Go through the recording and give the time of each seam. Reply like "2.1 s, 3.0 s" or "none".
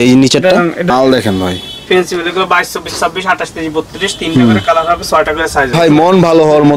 0.9 s, 5.7 s